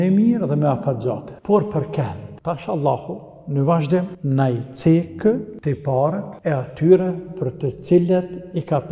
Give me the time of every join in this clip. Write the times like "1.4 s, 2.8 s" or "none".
1.3 s, 2.3 s, 4.2 s, 5.5 s, 6.3 s